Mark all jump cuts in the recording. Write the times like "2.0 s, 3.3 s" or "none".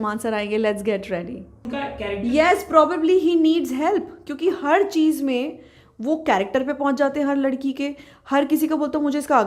1.7 s